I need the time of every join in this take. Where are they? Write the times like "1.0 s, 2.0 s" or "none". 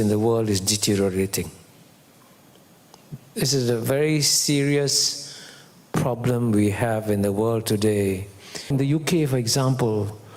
8.7 s